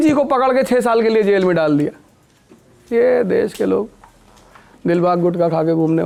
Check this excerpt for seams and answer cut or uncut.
uncut